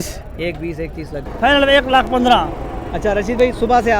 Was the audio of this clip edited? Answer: yes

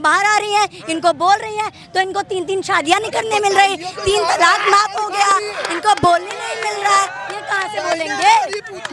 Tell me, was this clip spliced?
no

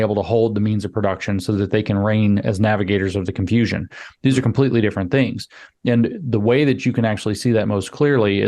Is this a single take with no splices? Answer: yes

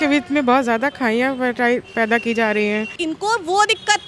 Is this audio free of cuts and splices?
no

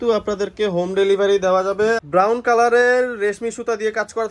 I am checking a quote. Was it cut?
yes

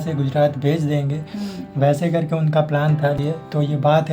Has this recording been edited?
yes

